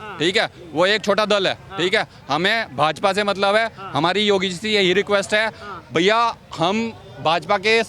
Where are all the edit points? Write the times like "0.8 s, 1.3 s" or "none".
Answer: none